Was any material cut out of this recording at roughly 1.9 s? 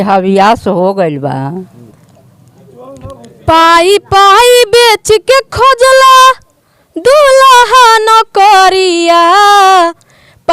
yes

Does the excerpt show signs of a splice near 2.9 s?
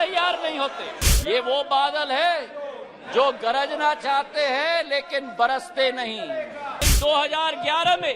no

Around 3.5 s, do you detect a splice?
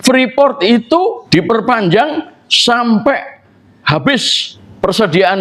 no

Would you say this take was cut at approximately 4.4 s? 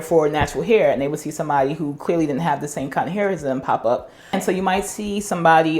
yes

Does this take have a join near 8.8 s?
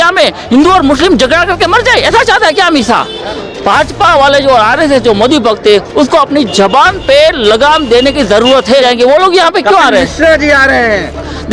yes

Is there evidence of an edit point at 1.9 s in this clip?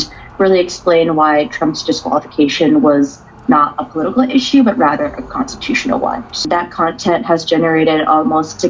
no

